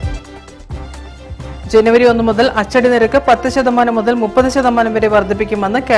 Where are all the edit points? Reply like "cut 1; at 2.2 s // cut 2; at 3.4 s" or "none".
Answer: cut 1; at 1.1 s